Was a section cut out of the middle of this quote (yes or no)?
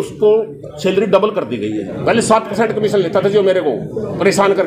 yes